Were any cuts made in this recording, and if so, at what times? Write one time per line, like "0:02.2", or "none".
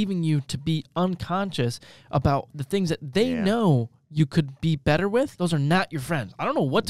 0:05.3